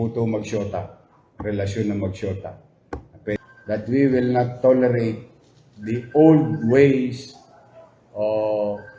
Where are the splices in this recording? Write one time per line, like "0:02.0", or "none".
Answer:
0:03.4